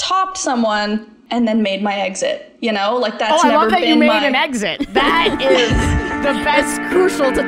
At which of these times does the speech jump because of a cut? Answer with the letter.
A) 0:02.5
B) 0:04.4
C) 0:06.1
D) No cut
C